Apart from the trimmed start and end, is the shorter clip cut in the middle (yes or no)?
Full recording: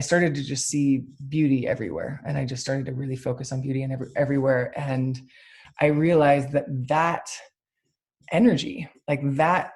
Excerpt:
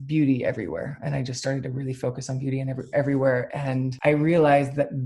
yes